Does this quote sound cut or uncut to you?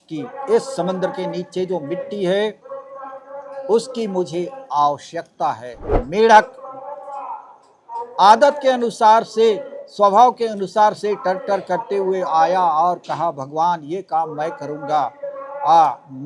cut